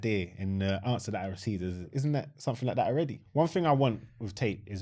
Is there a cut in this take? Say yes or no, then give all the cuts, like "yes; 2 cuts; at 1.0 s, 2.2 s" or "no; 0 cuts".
yes; 2 cuts; at 1.9 s, 3.2 s